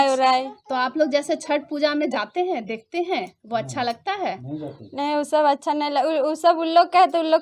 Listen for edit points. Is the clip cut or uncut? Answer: uncut